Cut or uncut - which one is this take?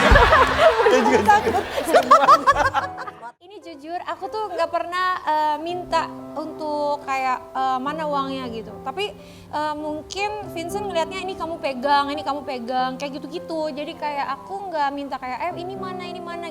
cut